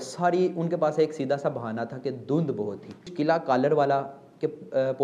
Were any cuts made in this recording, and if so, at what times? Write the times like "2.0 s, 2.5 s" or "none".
3.1 s